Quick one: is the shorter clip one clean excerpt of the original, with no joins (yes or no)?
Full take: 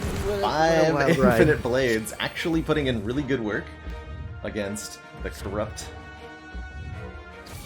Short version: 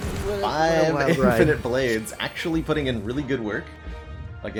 yes